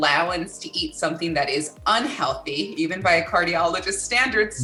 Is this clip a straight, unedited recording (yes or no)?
yes